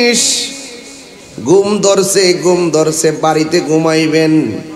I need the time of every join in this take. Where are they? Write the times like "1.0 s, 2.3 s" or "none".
none